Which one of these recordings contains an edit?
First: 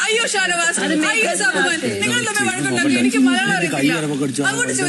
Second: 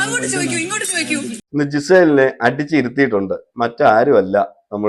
second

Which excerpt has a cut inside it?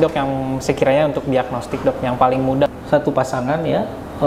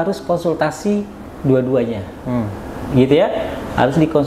first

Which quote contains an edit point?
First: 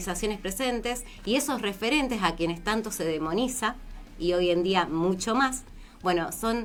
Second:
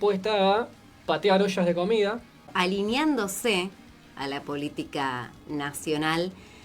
second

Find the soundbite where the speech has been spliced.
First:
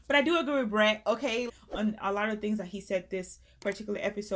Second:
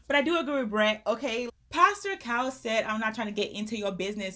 second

